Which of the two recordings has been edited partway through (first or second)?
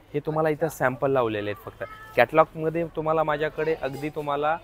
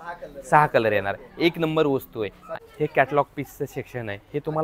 second